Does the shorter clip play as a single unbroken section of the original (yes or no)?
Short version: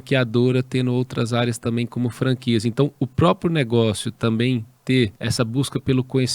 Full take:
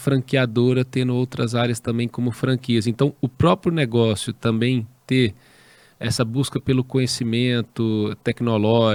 no